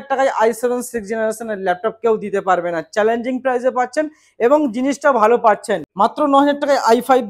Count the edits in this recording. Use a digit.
1